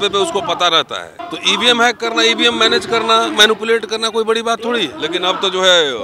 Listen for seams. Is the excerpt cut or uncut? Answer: cut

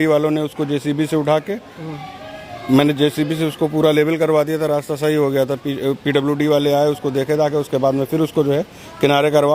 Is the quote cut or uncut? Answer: uncut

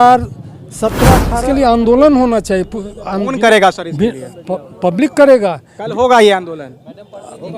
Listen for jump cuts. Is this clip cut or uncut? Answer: cut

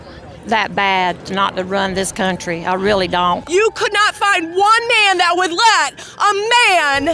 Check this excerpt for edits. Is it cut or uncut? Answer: cut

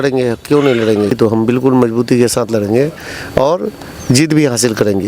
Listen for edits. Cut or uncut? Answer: cut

